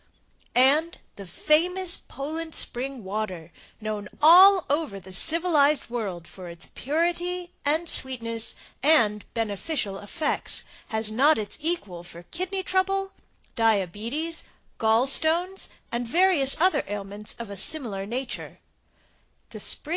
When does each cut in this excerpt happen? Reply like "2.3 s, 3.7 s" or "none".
15.8 s